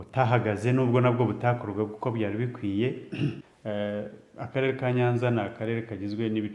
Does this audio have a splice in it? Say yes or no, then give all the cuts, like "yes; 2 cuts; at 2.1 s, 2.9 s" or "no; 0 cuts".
yes; 1 cut; at 3.5 s